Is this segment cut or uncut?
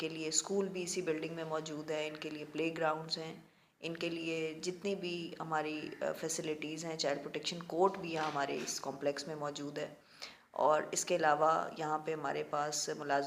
uncut